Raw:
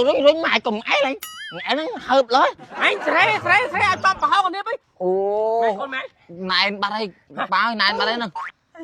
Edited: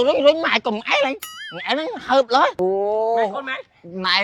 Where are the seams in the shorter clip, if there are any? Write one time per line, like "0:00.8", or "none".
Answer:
0:02.5